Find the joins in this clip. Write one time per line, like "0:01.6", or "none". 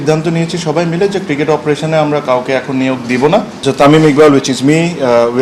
0:03.5

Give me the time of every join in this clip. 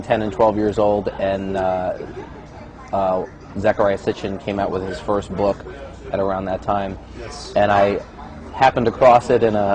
0:02.2

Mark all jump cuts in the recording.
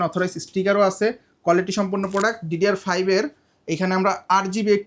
none

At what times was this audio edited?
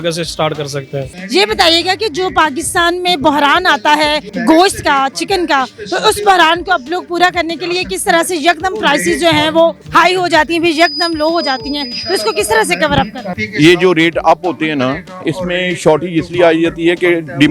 0:01.1
0:04.3
0:09.8

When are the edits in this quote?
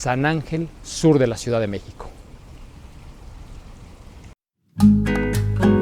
0:04.4

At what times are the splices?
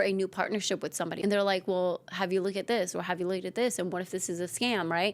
0:01.1

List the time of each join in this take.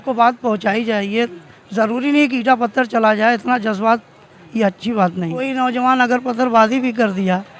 0:05.3

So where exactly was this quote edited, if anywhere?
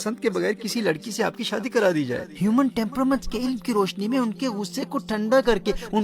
0:02.3

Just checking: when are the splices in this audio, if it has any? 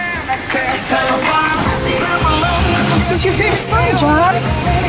none

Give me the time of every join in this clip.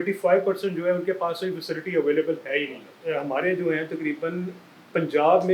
0:02.9

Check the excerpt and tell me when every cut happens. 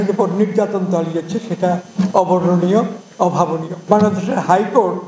0:03.9

